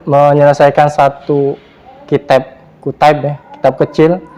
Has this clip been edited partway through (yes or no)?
no